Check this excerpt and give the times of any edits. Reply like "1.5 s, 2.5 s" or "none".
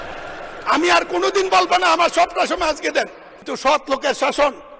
3.5 s